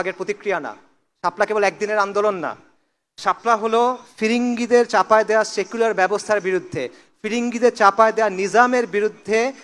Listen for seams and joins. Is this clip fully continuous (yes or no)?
yes